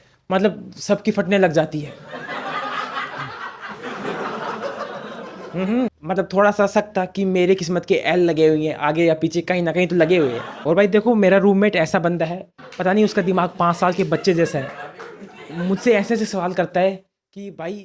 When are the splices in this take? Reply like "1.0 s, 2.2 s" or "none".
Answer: 5.9 s, 10.5 s